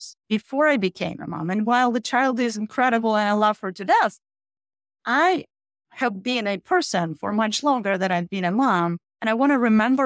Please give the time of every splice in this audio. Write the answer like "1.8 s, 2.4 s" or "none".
9.1 s